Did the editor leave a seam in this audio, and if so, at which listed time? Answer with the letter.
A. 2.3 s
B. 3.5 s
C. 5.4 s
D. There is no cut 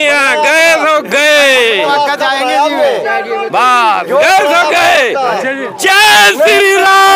D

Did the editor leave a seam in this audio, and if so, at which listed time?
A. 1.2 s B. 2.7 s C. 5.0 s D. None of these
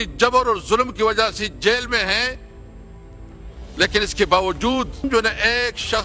C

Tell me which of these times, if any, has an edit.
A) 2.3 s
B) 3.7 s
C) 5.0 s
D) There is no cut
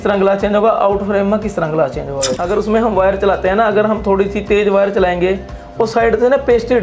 A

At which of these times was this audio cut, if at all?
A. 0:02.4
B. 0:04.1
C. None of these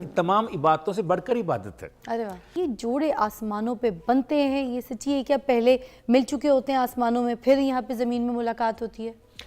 A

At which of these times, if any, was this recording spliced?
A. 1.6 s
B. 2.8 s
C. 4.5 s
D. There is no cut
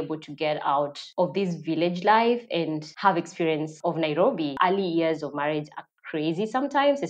C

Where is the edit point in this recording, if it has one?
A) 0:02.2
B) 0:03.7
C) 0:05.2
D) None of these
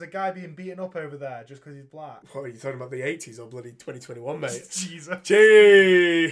A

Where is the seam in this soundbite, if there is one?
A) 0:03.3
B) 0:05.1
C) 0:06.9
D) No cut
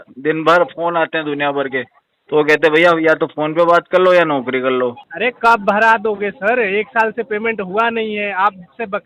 B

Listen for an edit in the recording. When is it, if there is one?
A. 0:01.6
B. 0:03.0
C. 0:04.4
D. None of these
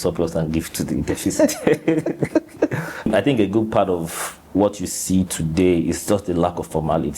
B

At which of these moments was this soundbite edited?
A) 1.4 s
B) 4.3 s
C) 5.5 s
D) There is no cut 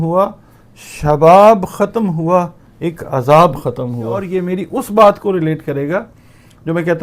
B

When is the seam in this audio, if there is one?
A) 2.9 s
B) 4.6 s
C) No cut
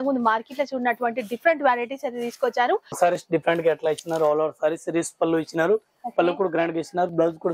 A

